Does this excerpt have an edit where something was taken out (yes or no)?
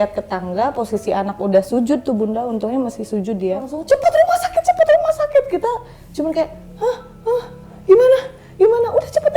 yes